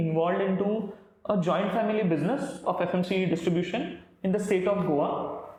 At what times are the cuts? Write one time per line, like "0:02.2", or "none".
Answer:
none